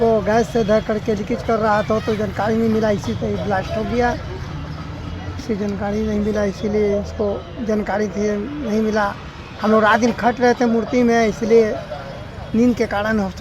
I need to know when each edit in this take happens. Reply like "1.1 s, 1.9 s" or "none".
none